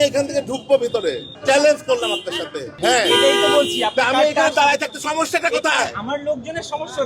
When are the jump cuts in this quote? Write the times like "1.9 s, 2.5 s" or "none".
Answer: 1.3 s, 2.7 s